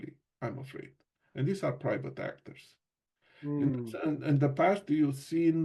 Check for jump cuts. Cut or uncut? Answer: uncut